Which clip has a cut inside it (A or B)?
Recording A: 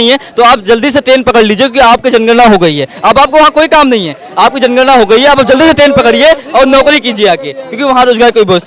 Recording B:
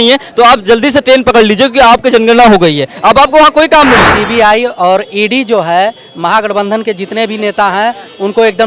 B